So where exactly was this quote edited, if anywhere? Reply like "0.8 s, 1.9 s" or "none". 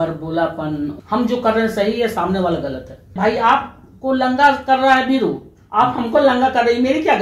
0.9 s, 3.1 s